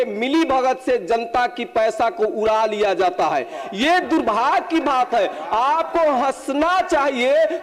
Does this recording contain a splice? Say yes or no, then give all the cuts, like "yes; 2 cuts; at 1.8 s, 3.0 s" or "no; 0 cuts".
no; 0 cuts